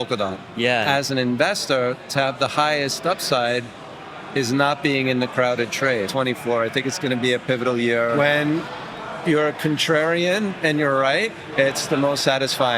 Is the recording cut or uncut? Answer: cut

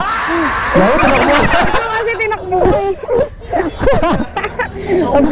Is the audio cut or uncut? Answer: uncut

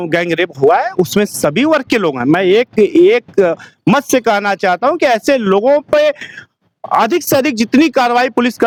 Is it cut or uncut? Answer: uncut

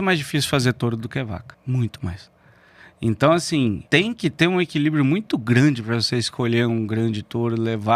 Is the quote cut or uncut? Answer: cut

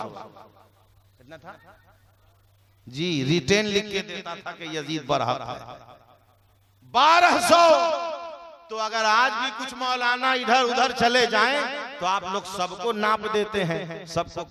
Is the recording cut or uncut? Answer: uncut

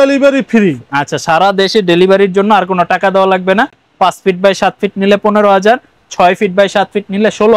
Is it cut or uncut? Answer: uncut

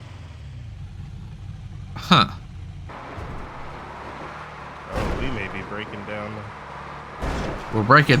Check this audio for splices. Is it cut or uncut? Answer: cut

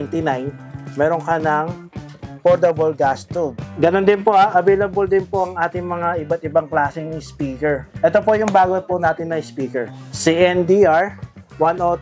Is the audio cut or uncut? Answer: cut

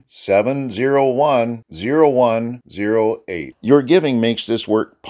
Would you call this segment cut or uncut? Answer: uncut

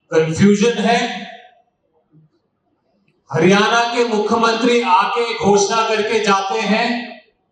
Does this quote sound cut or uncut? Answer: uncut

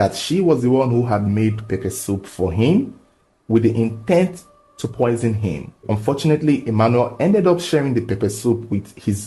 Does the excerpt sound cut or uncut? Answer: uncut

